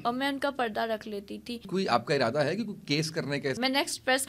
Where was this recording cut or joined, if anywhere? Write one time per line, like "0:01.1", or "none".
0:01.7
0:03.6